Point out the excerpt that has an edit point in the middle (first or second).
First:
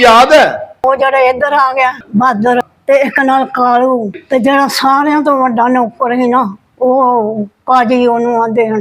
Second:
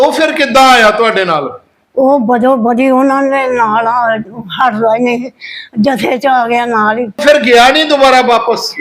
second